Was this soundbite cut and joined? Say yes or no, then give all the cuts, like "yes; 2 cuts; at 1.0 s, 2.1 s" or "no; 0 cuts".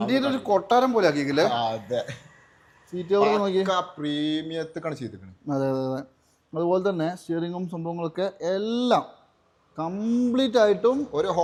no; 0 cuts